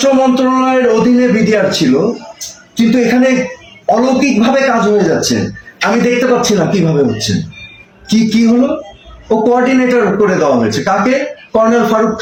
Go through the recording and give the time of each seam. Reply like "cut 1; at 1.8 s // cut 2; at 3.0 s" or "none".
none